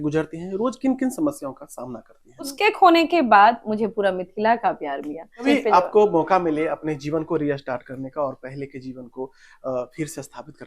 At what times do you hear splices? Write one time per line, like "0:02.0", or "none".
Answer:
0:02.5
0:05.4